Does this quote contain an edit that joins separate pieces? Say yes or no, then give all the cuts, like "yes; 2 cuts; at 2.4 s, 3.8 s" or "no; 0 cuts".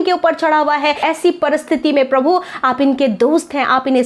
yes; 1 cut; at 1.0 s